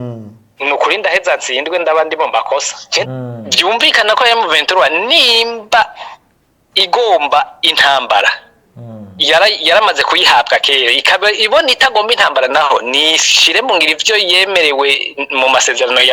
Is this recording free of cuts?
no; 1 cut; at 3.0 s

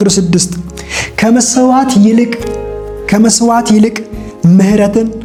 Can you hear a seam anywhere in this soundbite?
no; 0 cuts

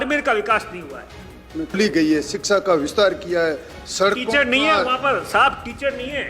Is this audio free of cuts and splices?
no; 1 cut; at 1.8 s

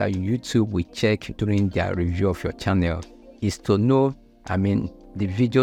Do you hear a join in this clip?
no; 0 cuts

